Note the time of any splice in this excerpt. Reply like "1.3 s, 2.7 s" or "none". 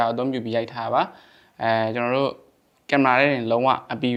none

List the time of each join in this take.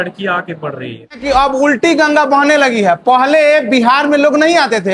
1.2 s

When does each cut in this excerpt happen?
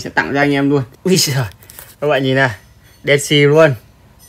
0.9 s

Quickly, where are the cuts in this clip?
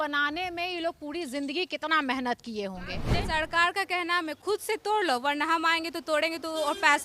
3.1 s, 4.4 s

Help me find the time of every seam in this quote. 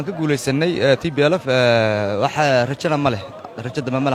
none

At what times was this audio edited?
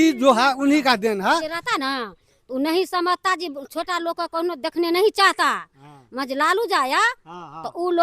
1.6 s

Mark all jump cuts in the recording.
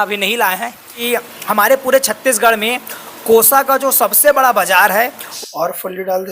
0.9 s, 5.2 s

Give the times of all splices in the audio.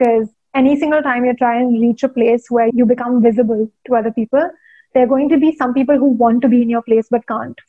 2.7 s

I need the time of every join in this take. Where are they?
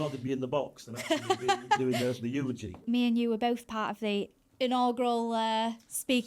2.8 s

